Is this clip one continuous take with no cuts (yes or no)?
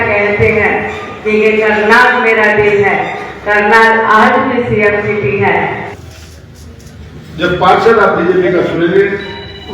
no